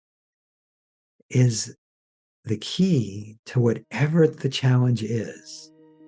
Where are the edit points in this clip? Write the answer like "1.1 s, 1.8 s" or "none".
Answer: none